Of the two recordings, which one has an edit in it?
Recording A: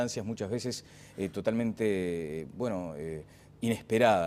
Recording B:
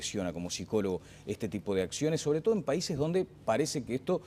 B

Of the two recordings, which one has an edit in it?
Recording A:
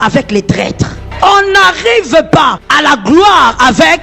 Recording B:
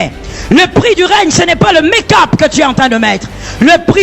A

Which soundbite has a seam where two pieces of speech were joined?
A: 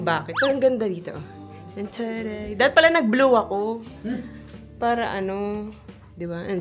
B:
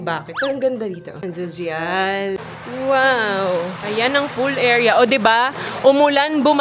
B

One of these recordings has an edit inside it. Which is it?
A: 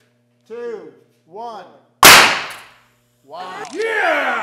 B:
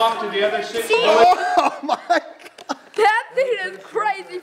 B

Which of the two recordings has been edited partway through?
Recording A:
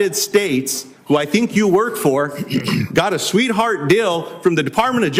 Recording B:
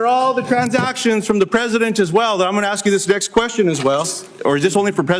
B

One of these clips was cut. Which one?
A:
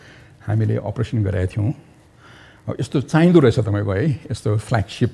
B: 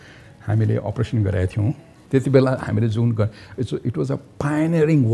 B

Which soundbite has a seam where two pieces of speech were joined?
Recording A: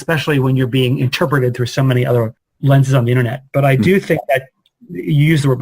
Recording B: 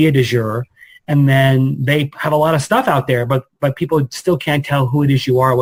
A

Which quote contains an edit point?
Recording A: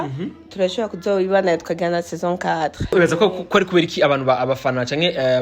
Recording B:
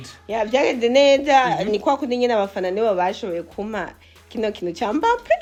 A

